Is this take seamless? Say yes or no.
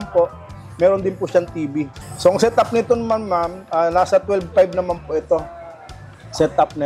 yes